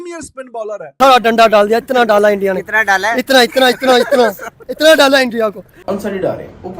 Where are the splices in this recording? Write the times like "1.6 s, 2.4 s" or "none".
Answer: 0.9 s, 5.7 s